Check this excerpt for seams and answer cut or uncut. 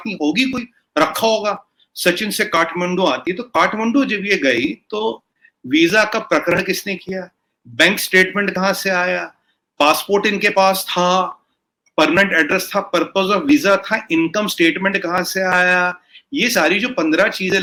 uncut